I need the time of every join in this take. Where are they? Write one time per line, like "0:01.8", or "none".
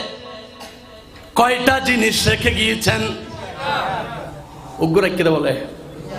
none